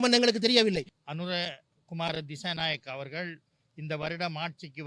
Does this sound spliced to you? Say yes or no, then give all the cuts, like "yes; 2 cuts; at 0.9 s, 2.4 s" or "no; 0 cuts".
yes; 1 cut; at 0.9 s